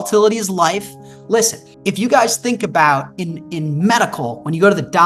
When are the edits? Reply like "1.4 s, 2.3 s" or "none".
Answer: 1.7 s